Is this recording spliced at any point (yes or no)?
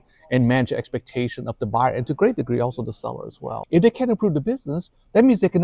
yes